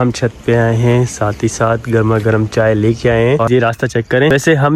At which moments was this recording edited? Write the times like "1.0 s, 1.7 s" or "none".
3.5 s